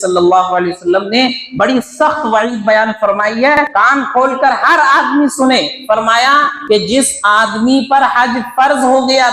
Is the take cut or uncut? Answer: cut